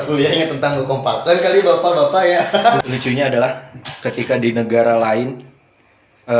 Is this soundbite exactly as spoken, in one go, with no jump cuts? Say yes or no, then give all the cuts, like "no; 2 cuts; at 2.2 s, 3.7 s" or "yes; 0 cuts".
no; 1 cut; at 2.8 s